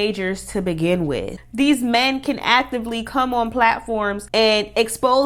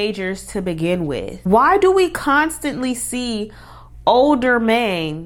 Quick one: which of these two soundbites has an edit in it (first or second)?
first